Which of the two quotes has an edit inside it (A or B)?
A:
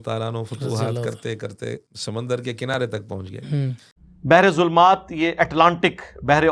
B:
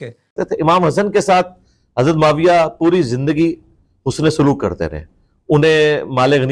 A